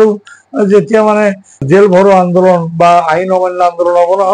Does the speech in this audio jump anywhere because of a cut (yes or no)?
yes